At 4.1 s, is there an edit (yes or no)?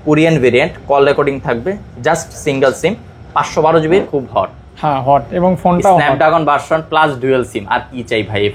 yes